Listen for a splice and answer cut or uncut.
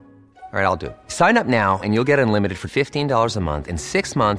uncut